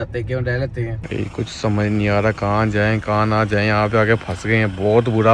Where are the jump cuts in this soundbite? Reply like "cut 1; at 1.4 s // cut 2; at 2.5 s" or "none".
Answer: cut 1; at 1.0 s